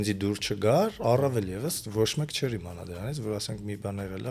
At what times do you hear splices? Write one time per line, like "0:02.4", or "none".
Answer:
none